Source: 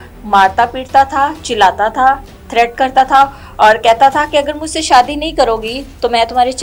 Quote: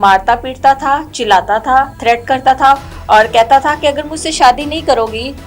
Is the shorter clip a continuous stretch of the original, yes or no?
no